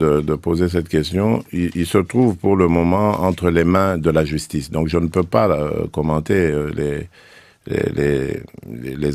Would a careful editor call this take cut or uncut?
uncut